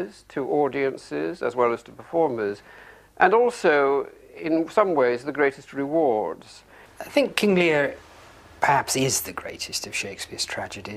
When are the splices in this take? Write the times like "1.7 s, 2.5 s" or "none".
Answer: none